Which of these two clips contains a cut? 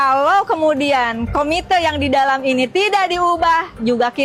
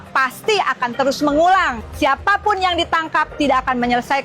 second; 1 cut; at 1.8 s

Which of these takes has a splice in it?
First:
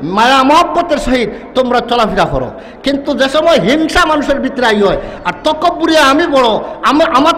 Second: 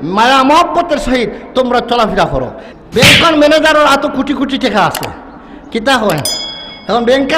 second; 1 cut; at 2.6 s

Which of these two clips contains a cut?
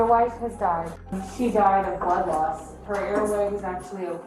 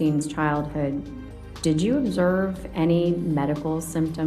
first; 2 cuts; at 1.0 s, 2.7 s

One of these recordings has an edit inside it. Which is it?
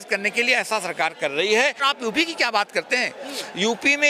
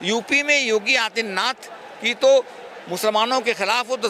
first; 1 cut; at 1.8 s

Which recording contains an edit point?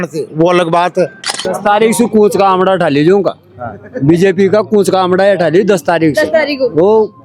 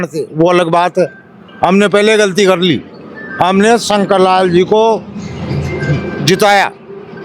first; 1 cut; at 1.4 s

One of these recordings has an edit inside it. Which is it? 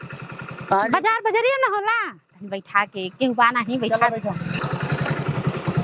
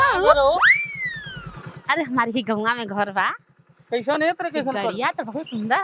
first; 1 cut; at 4.5 s

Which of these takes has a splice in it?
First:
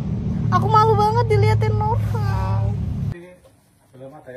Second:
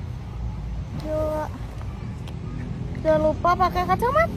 first; 1 cut; at 3.1 s

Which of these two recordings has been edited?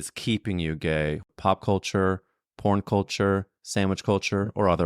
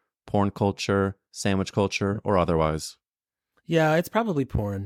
first; 1 cut; at 1.2 s

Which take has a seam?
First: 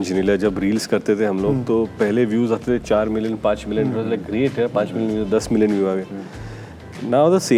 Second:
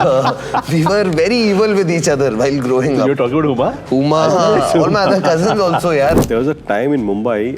second; 1 cut; at 6.2 s

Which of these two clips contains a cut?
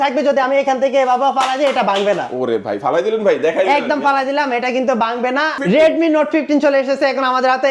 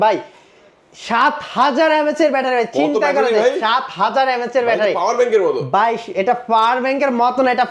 first; 1 cut; at 5.6 s

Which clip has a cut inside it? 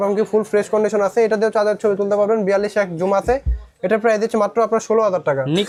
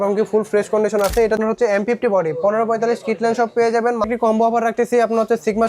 second; 2 cuts; at 1.3 s, 4.1 s

